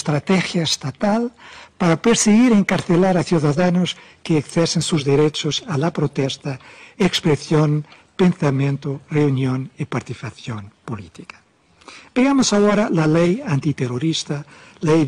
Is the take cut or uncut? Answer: uncut